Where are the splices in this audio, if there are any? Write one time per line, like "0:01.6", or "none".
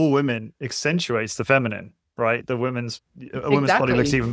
none